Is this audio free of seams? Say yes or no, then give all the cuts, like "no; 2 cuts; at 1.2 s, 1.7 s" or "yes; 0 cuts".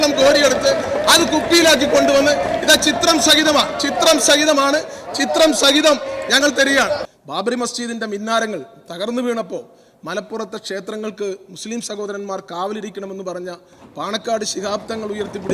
no; 1 cut; at 7.1 s